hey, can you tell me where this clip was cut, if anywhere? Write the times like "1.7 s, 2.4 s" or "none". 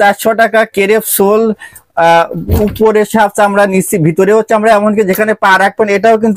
none